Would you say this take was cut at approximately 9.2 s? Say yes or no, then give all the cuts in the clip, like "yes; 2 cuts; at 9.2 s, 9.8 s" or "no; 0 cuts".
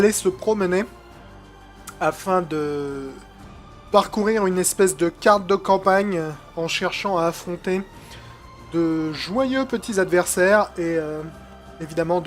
yes; 1 cut; at 9.2 s